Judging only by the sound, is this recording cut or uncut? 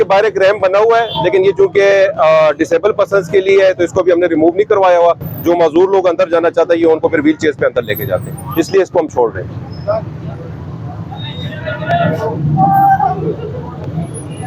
uncut